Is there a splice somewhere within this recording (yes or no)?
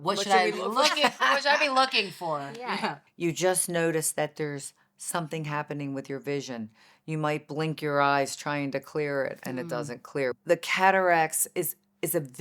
yes